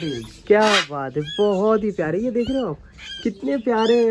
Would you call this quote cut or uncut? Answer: uncut